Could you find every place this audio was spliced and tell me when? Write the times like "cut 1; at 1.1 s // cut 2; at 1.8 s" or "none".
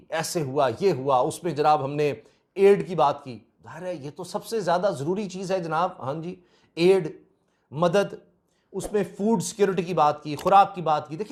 none